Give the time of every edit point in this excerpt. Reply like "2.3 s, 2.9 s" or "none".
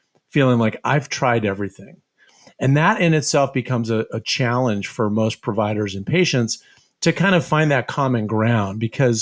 none